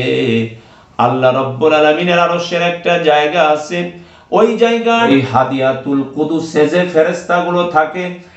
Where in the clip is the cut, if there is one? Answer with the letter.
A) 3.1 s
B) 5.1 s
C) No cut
B